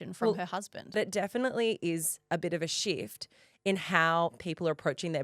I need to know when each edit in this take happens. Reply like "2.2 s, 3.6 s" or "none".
1.0 s